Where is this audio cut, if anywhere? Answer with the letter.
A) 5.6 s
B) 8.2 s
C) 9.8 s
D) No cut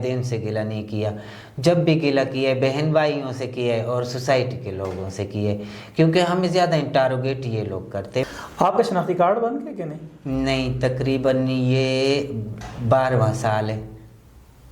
B